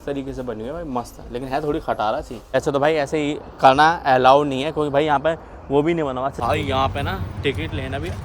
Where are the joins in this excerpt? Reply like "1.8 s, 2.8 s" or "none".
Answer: 2.5 s, 6.4 s